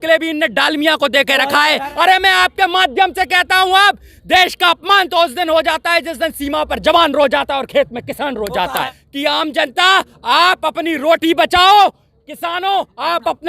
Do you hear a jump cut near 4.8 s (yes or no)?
no